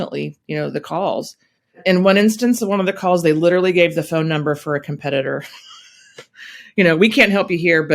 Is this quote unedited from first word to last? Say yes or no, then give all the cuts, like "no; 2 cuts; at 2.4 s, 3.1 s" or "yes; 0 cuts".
yes; 0 cuts